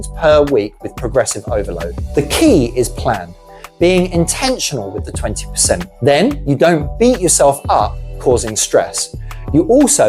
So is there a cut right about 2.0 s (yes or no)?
yes